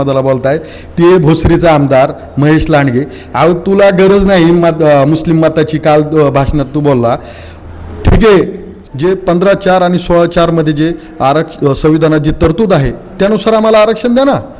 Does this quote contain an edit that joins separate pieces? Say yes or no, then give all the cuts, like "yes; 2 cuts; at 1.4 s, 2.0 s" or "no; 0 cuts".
yes; 1 cut; at 8.8 s